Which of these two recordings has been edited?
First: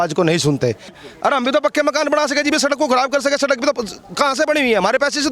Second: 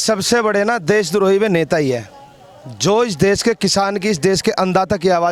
first; 1 cut; at 1.0 s

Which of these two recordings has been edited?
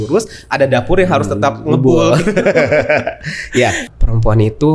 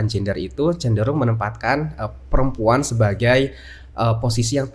first; 1 cut; at 3.9 s

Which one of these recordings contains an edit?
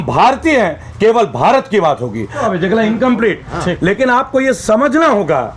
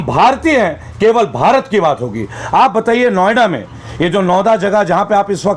first; 1 cut; at 2.4 s

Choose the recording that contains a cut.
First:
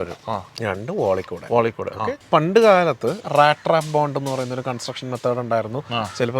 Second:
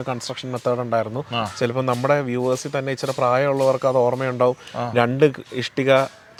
first; 2 cuts; at 2.2 s, 3.2 s

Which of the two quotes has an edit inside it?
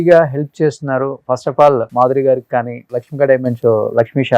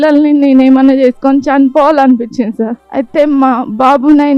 second; 1 cut; at 2.8 s

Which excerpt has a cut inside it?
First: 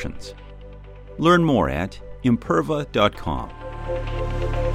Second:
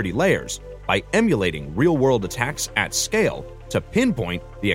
first; 1 cut; at 3.7 s

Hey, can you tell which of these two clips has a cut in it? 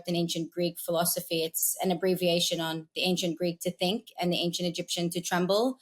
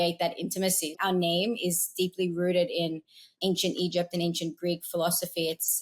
second; 1 cut; at 0.9 s

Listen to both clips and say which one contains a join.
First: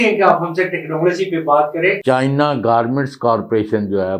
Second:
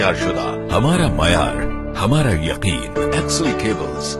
first; 1 cut; at 2.0 s

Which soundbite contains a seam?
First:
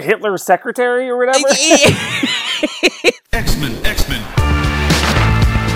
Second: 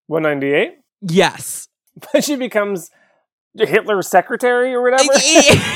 first; 1 cut; at 3.3 s

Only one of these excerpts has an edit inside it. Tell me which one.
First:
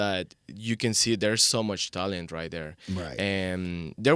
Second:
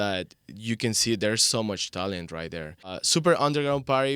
second; 1 cut; at 2.9 s

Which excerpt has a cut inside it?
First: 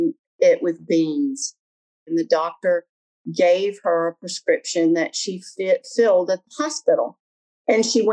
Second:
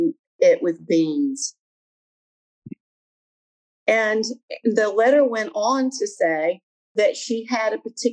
first; 1 cut; at 2.1 s

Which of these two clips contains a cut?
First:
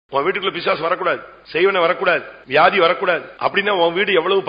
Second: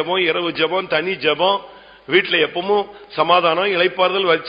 first; 3 cuts; at 1.3 s, 2.3 s, 3.3 s

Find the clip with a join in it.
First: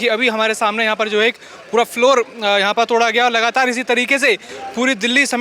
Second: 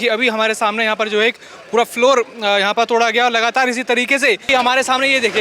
second; 1 cut; at 4.5 s

